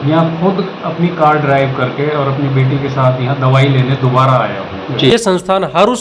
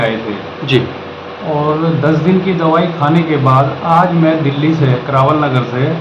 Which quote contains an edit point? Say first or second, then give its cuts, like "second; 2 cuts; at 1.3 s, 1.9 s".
first; 1 cut; at 5.1 s